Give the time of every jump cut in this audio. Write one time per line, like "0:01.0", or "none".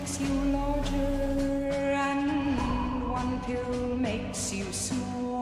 0:02.6